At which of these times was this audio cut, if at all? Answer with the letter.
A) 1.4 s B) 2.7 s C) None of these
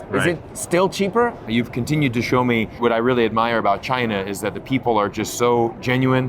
A